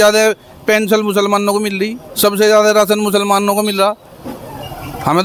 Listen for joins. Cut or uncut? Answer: uncut